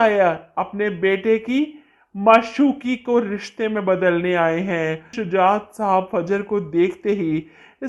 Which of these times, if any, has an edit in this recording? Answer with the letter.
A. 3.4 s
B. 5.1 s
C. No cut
B